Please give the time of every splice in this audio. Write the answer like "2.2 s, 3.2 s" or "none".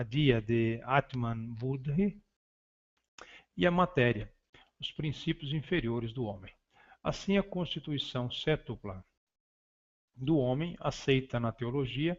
none

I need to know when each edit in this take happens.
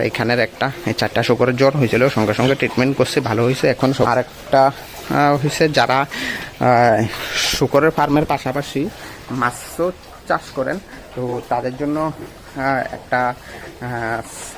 4.1 s

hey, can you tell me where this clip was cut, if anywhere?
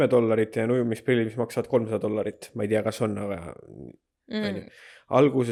none

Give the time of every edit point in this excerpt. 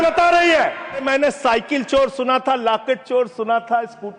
1.0 s

